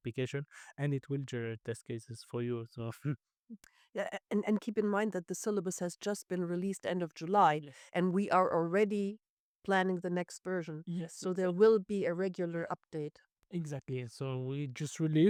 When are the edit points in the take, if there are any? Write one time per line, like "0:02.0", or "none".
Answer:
none